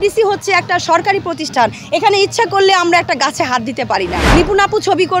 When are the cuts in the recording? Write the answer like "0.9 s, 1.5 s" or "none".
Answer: 4.3 s